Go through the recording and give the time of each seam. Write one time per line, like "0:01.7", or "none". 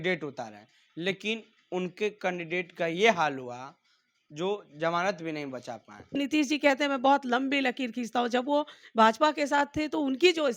0:06.2